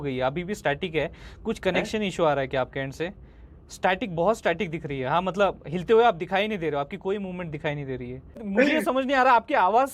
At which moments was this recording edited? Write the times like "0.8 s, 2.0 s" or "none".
8.4 s